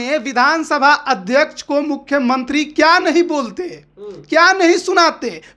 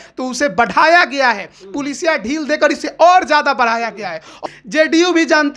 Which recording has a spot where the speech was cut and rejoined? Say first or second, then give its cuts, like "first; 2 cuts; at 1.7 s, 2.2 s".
second; 1 cut; at 4.3 s